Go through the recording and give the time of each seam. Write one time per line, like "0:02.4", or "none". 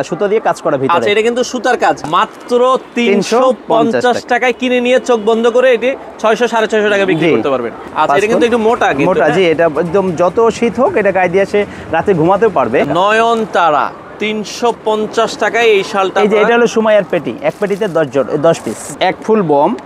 0:02.0
0:07.8
0:12.9
0:18.8